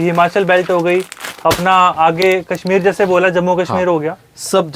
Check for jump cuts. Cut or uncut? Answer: uncut